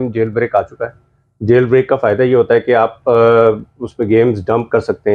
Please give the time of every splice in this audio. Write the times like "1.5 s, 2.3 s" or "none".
none